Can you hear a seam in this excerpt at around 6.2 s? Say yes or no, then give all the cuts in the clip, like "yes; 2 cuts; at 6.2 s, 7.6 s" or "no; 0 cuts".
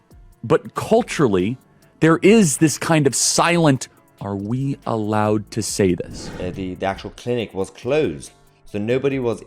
yes; 1 cut; at 6.2 s